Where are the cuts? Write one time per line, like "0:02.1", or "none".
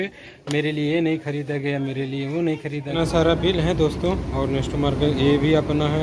0:03.0